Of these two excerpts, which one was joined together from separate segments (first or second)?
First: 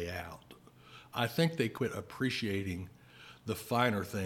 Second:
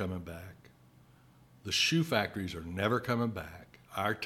first